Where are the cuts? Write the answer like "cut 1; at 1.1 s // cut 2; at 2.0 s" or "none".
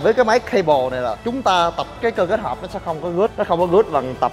cut 1; at 1.9 s // cut 2; at 3.3 s